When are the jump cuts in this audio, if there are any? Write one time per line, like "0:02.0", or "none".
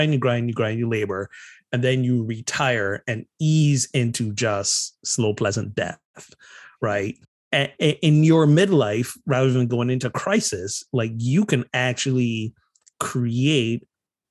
0:07.3